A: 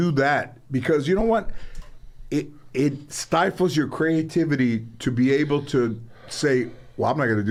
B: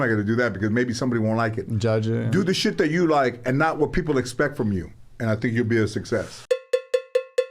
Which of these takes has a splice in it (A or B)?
B